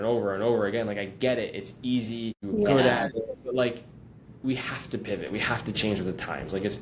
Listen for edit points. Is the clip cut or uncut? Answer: cut